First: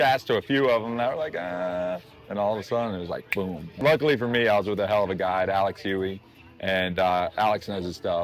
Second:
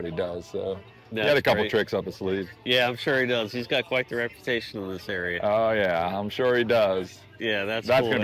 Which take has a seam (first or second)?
first